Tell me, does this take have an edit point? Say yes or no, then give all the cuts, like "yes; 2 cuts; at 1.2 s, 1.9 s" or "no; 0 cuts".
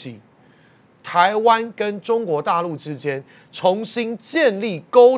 no; 0 cuts